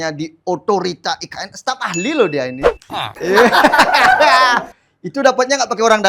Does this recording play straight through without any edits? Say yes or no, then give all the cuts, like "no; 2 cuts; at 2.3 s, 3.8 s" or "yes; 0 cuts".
yes; 0 cuts